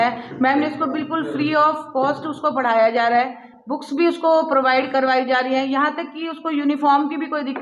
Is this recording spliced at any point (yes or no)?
no